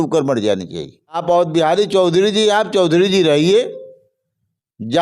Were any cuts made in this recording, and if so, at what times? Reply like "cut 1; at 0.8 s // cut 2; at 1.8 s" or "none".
cut 1; at 1.2 s